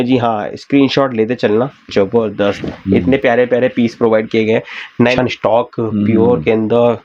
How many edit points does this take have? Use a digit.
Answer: 1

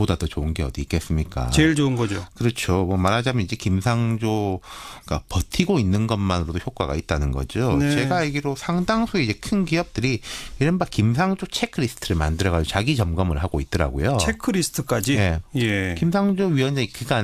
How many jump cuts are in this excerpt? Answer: 1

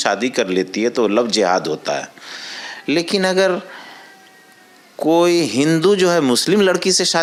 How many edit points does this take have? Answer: 0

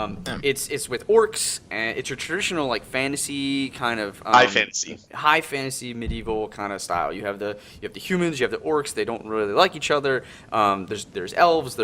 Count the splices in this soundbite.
1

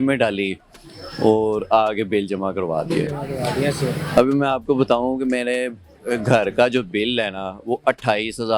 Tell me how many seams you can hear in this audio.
0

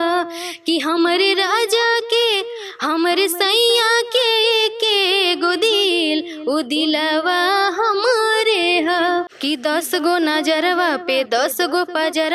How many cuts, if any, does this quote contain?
1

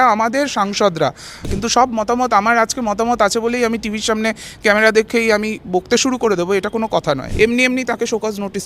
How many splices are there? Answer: 2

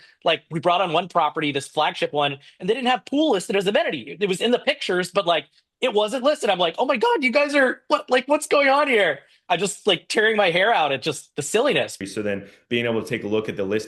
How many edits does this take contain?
1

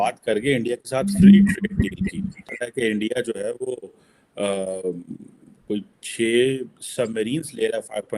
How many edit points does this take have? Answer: 1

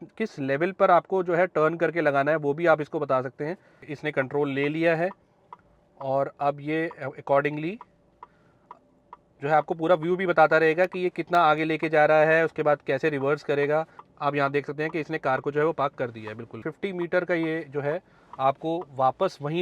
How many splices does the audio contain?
3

